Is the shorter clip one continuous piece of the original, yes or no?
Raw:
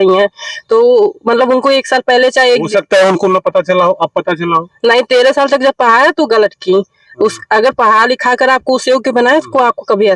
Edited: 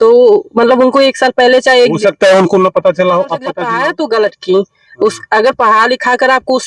no